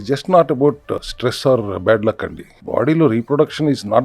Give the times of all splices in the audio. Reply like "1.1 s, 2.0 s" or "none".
1.0 s